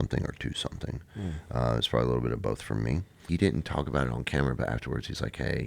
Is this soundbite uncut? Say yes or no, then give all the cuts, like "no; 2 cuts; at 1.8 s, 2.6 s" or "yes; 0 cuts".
no; 1 cut; at 3.1 s